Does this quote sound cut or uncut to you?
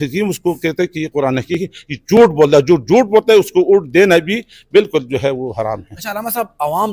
uncut